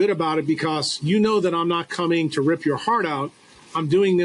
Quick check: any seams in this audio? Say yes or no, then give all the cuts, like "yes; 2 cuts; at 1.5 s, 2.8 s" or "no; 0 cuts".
no; 0 cuts